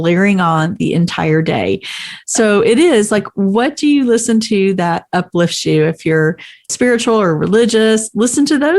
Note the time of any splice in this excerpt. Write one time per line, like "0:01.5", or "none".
0:06.7